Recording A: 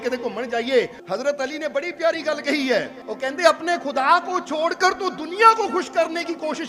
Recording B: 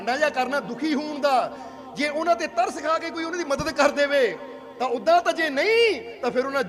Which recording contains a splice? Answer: A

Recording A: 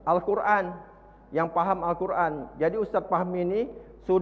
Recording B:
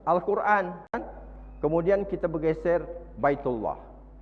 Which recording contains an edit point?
B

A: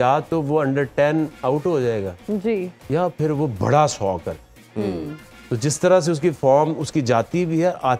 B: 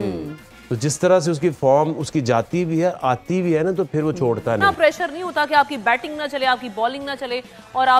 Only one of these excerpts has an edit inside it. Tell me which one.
B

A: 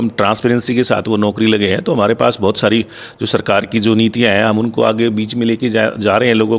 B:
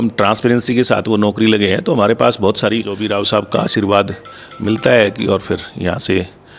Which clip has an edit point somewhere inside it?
B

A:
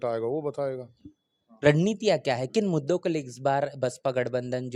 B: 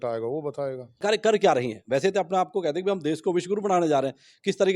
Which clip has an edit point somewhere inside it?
B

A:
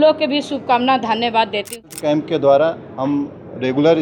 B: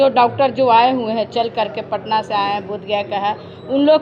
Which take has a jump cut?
A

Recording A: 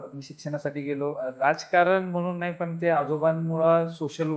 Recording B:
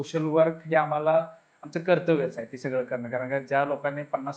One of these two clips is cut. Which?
A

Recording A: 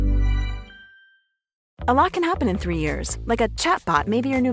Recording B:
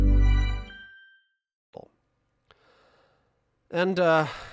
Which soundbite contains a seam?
A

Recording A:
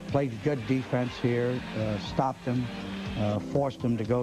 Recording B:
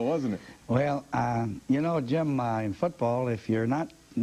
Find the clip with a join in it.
A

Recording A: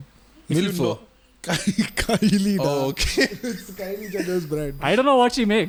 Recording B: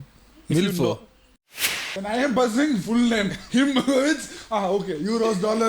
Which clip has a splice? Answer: B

